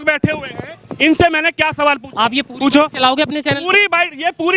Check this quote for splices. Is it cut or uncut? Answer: uncut